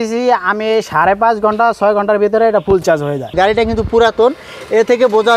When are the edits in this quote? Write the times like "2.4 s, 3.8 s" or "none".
3.3 s